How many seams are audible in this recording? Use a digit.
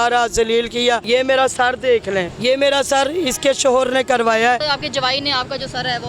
3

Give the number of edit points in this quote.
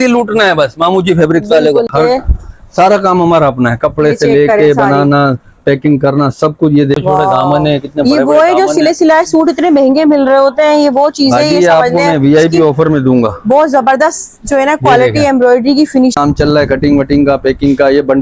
3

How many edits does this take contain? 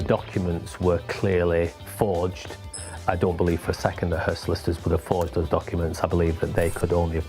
1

